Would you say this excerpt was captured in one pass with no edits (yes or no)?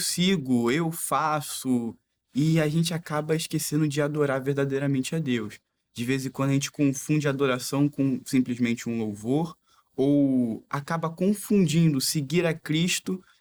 yes